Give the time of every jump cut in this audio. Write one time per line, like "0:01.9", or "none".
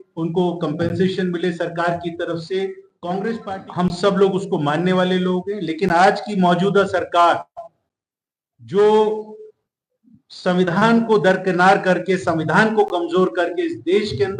0:03.4